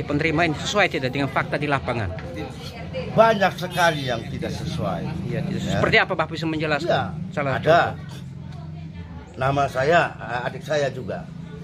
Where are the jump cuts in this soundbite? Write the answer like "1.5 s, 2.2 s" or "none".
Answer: none